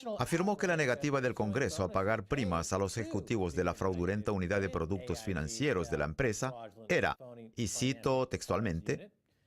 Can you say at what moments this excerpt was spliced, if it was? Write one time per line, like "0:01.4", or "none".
0:01.9